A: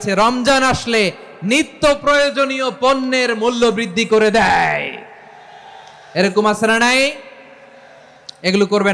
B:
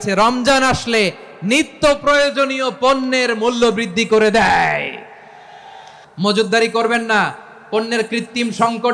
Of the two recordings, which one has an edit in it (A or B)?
B